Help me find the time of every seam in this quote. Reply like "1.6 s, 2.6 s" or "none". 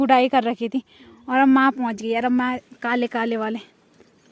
2.6 s